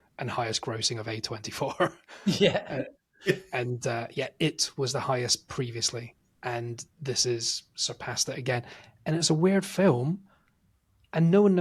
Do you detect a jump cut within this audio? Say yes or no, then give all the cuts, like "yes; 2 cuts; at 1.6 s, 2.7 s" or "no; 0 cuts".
no; 0 cuts